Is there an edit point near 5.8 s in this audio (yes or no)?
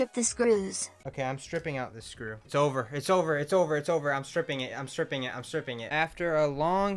yes